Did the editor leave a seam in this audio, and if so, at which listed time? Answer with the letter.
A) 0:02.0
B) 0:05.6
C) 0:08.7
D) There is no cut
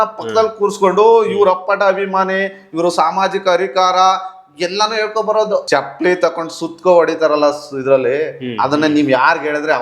B